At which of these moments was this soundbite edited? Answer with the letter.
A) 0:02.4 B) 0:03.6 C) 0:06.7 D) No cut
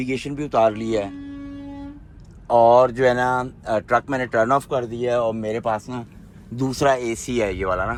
D